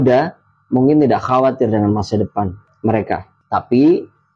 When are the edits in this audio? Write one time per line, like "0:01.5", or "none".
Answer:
none